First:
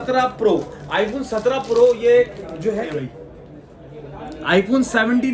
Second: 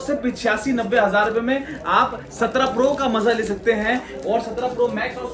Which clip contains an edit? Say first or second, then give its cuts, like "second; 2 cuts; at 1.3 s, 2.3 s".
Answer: first; 1 cut; at 2.9 s